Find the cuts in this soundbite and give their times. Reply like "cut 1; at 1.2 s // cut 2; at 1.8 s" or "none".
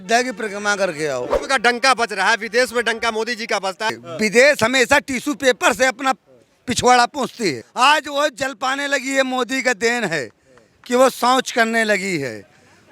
cut 1; at 1.4 s // cut 2; at 4.0 s // cut 3; at 7.6 s